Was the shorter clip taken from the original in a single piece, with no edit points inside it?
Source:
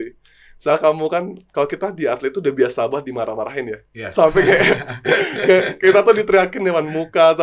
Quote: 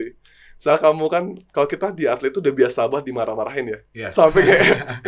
yes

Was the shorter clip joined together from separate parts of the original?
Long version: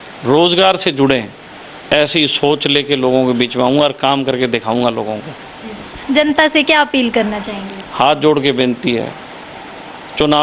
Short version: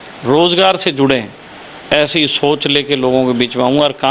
no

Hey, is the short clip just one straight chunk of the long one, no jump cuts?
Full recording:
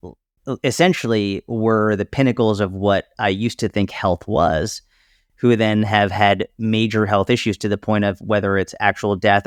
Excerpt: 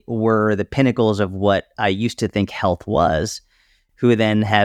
yes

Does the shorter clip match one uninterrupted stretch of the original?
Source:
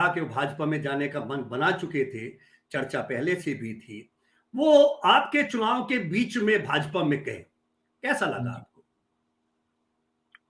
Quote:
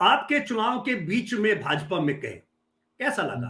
yes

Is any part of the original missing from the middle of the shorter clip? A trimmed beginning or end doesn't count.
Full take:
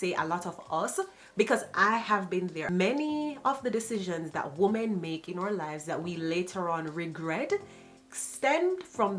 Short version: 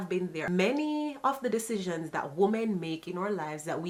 no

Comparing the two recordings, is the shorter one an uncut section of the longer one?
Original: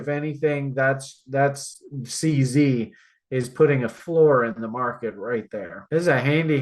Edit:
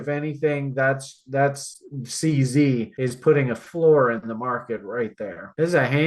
no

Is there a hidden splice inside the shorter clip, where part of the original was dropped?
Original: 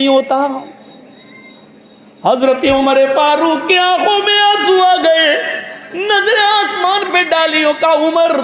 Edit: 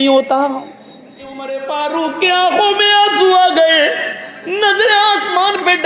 yes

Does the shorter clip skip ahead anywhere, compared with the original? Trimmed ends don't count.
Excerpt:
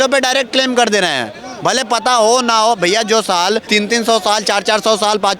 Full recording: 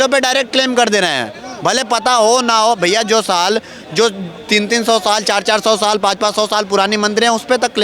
yes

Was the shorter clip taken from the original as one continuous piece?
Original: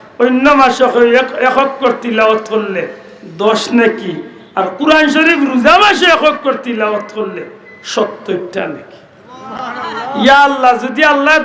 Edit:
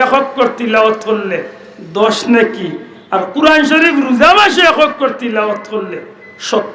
yes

